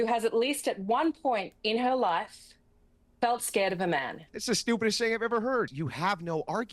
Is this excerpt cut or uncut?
cut